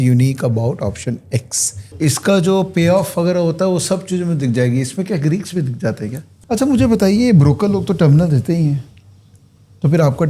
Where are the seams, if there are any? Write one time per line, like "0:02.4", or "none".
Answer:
0:01.9
0:06.3